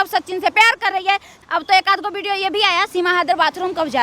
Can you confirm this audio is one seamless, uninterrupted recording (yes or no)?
no